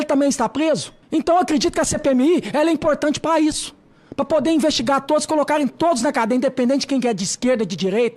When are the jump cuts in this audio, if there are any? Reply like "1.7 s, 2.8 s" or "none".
0.9 s